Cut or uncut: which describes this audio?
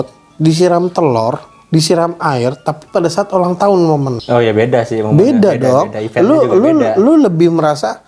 cut